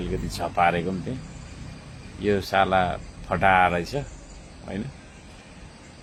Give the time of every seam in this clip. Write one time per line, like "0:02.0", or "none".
none